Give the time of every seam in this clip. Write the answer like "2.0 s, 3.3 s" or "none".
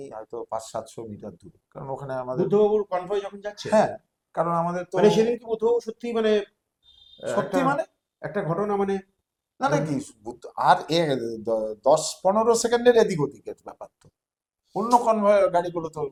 none